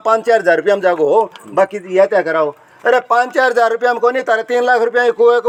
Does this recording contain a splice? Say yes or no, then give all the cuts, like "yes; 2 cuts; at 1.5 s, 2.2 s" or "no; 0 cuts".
no; 0 cuts